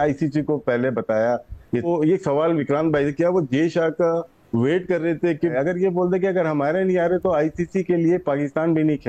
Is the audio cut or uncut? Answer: cut